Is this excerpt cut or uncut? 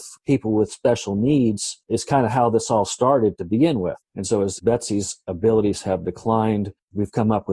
cut